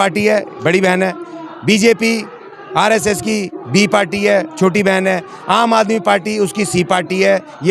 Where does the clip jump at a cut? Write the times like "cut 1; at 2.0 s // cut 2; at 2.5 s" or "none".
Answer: none